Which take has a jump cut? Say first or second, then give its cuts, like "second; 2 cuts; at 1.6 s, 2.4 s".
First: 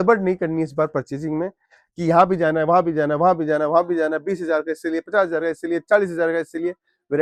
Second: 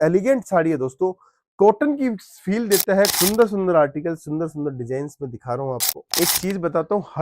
second; 2 cuts; at 3.1 s, 6.1 s